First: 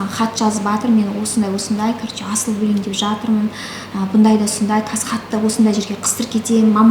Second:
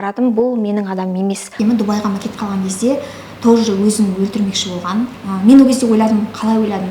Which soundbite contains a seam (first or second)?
second